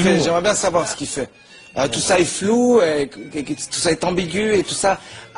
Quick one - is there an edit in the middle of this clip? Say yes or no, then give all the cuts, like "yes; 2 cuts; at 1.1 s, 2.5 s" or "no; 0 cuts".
no; 0 cuts